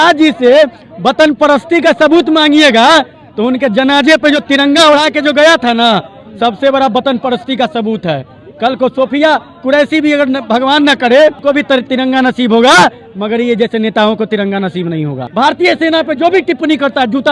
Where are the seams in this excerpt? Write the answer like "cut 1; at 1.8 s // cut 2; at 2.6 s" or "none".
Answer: cut 1; at 11.4 s // cut 2; at 15.2 s